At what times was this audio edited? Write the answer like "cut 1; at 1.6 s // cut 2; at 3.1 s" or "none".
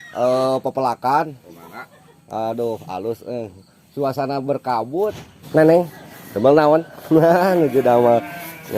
cut 1; at 5.3 s